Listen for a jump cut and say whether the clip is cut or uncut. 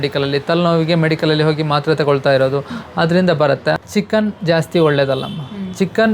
cut